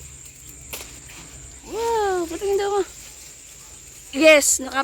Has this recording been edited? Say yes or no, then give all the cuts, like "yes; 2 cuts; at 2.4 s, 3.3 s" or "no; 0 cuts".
no; 0 cuts